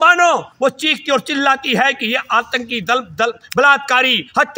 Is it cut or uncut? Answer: uncut